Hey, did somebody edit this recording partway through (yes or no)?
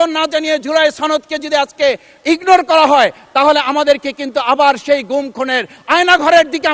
no